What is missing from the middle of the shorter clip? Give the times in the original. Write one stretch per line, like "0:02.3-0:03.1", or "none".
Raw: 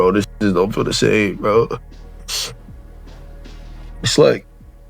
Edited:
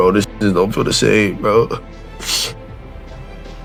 none